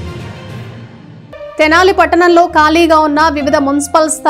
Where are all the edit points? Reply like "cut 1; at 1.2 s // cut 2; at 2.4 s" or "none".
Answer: cut 1; at 1.1 s